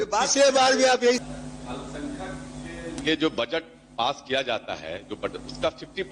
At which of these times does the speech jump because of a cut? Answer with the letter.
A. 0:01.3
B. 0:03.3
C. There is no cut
A